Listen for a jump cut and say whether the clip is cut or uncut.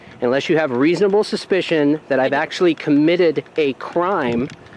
uncut